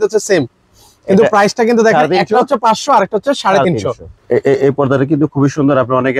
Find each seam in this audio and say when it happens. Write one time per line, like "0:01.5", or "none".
0:04.2